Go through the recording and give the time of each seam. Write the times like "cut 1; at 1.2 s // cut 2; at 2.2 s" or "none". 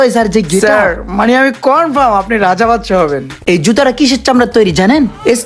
cut 1; at 3.3 s